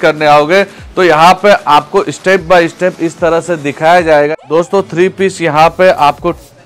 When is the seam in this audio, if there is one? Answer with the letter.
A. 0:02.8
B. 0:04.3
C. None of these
B